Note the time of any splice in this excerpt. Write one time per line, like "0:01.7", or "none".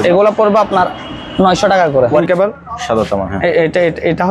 0:02.2